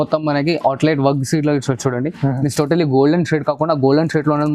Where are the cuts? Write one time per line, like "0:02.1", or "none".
none